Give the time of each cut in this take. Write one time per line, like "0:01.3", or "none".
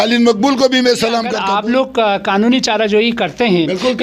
0:01.4

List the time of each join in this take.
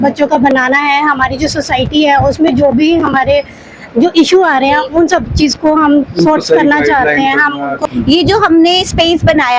0:07.8

